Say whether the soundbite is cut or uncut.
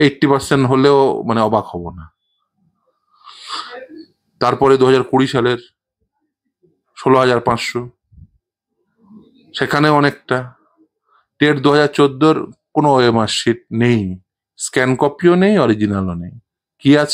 uncut